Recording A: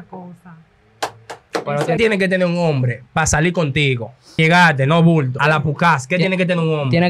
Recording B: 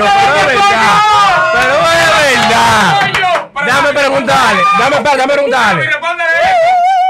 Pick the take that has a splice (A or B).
A